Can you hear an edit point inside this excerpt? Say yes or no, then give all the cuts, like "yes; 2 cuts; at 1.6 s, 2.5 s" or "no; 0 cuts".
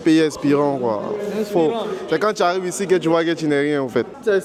no; 0 cuts